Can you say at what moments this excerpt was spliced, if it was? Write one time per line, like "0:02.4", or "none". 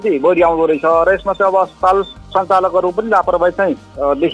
none